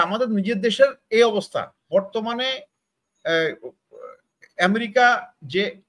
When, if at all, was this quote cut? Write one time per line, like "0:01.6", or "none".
0:01.8